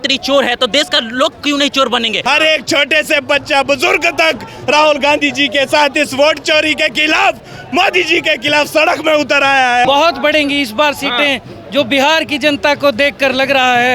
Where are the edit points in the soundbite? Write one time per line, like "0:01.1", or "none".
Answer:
0:02.2
0:09.8